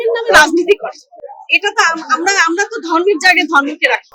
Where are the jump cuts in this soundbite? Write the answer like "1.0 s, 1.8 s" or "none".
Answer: none